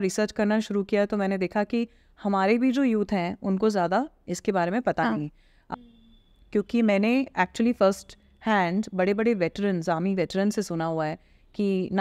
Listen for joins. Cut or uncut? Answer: cut